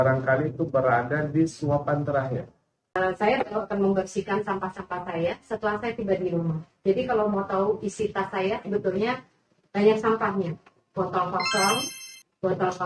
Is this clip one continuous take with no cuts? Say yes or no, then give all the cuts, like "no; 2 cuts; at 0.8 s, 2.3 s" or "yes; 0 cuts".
no; 1 cut; at 3.0 s